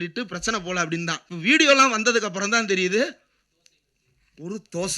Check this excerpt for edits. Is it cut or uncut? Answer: cut